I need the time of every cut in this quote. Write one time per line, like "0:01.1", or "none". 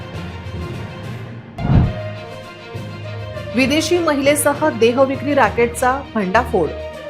0:01.4